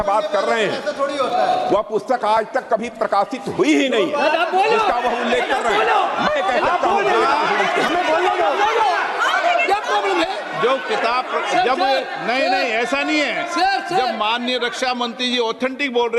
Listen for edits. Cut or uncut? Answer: uncut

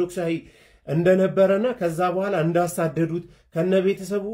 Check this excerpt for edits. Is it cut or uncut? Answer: uncut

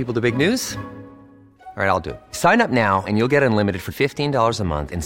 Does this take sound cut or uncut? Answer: uncut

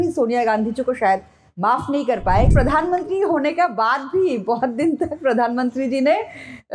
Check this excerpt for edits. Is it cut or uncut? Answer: cut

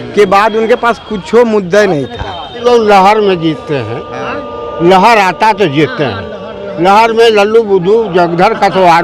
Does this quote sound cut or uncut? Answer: cut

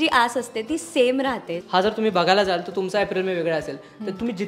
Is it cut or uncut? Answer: cut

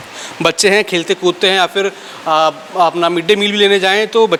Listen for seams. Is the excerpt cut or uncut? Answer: uncut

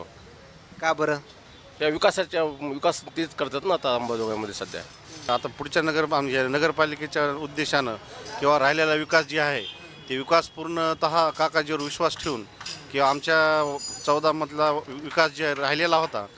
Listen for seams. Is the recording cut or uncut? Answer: cut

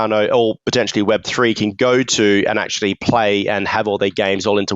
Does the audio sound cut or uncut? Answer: uncut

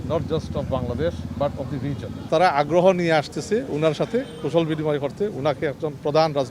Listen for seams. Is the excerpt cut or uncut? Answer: cut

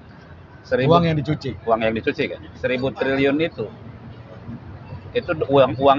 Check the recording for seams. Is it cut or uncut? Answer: uncut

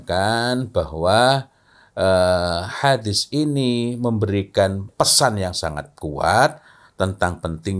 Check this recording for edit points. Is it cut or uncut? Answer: cut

